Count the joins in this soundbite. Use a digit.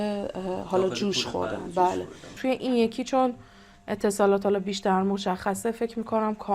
1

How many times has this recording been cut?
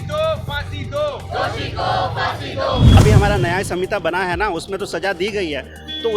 1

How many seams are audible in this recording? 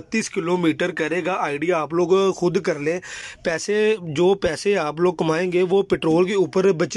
0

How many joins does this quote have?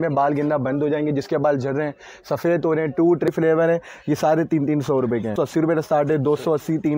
2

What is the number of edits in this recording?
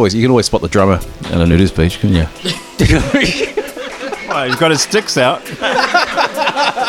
0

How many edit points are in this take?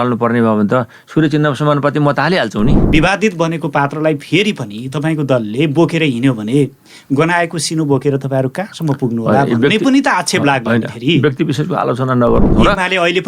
2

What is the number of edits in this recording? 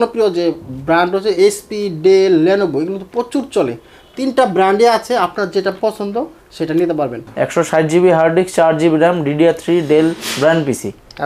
1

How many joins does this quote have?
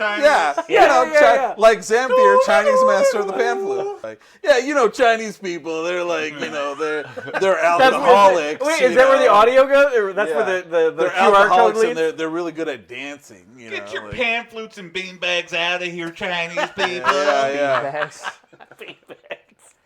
1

